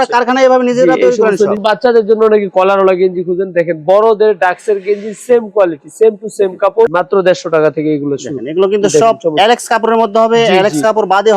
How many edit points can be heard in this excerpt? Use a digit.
2